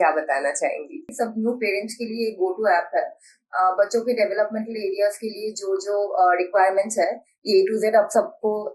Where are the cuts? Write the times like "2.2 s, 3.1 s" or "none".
1.1 s